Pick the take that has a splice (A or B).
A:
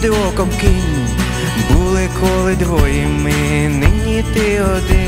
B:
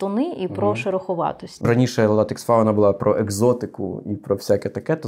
B